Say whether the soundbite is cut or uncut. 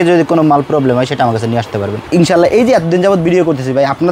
cut